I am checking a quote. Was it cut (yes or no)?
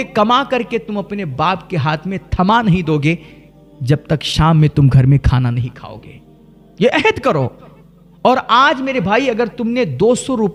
no